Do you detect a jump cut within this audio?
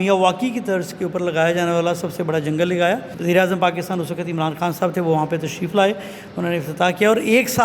yes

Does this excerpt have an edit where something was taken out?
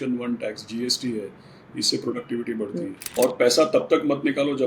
yes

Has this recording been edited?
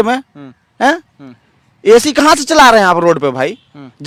no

